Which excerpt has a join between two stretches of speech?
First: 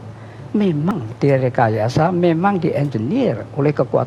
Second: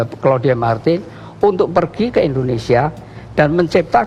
first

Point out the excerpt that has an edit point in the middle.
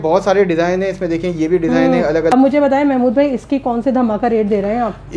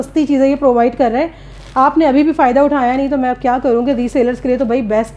first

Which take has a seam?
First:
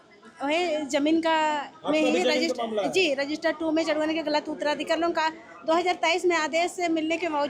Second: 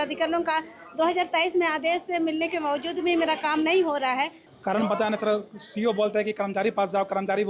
second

